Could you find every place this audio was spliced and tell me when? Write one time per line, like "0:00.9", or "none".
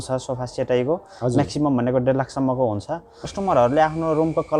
0:03.3